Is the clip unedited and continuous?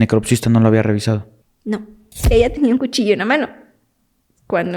no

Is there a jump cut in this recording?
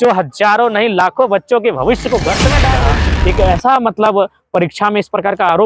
yes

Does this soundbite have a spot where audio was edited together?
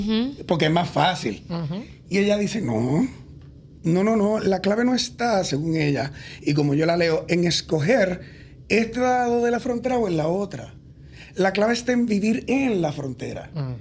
no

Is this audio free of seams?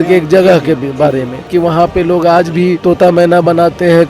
no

